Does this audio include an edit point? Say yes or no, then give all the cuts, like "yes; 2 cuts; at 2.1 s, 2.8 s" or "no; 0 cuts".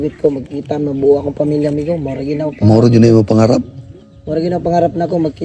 no; 0 cuts